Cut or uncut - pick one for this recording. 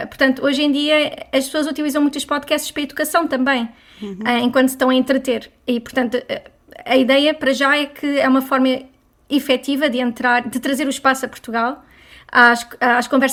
uncut